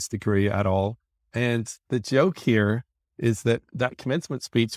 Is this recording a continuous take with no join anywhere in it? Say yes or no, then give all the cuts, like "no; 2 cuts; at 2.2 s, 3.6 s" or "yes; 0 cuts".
no; 1 cut; at 1.2 s